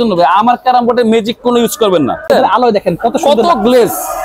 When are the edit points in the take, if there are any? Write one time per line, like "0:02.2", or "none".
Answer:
0:02.3